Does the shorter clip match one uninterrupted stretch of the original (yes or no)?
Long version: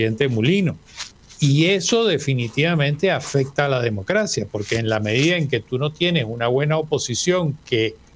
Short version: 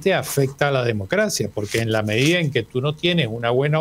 yes